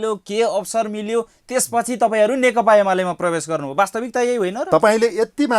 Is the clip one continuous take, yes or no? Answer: yes